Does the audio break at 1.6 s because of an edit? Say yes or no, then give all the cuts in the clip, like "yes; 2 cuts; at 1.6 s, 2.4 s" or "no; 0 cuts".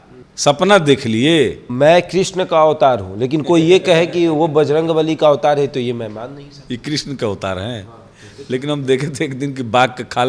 no; 0 cuts